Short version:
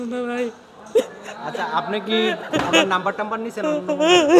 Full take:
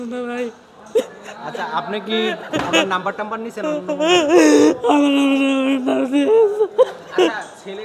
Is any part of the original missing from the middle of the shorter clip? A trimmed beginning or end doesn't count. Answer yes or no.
no